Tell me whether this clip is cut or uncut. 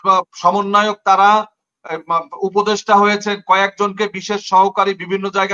uncut